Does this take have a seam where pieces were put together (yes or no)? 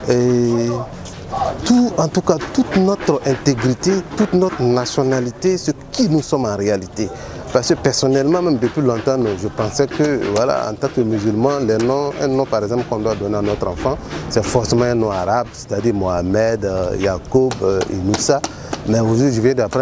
no